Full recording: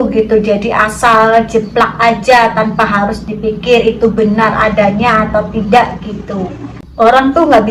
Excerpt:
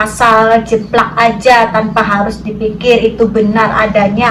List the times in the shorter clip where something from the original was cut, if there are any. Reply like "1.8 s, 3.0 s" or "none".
none